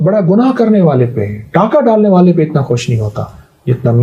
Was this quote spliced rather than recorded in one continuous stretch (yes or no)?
no